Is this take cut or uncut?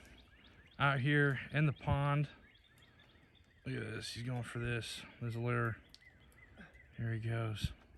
uncut